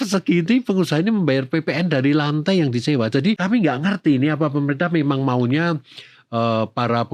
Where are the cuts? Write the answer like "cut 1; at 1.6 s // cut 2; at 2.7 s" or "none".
cut 1; at 3.4 s